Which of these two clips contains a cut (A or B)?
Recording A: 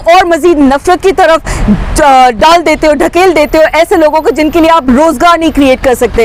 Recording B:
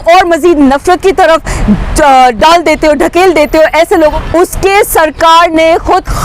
B